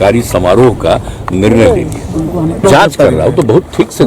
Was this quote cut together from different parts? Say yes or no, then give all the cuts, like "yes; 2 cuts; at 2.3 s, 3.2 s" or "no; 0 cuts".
yes; 1 cut; at 2.6 s